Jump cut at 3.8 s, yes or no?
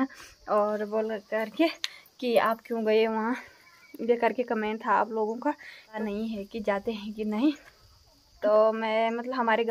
no